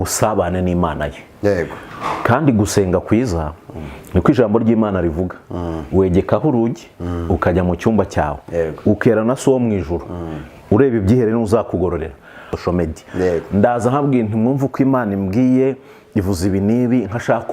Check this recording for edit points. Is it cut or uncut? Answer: cut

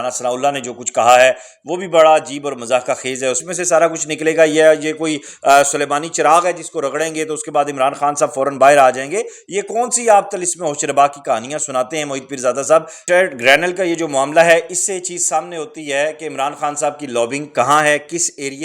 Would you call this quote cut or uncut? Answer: cut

